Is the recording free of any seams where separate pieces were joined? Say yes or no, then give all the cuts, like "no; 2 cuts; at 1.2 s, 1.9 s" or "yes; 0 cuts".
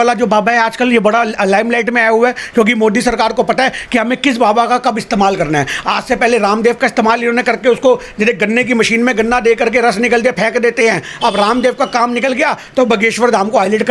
yes; 0 cuts